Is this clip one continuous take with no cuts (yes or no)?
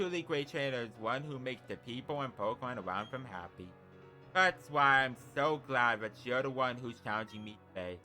yes